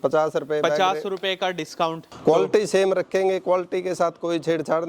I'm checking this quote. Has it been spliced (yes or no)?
yes